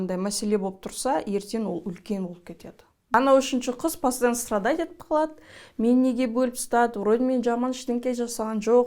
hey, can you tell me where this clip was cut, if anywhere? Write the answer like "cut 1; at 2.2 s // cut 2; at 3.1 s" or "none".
cut 1; at 3.1 s